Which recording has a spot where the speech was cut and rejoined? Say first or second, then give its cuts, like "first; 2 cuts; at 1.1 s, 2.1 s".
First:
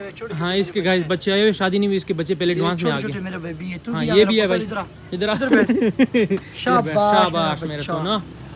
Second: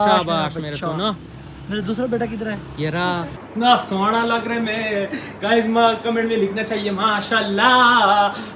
second; 1 cut; at 3.4 s